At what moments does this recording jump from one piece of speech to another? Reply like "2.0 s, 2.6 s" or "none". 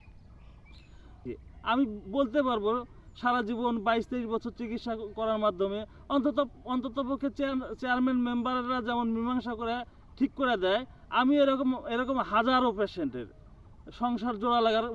1.3 s

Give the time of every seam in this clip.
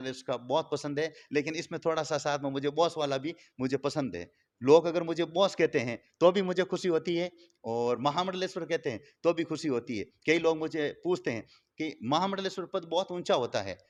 none

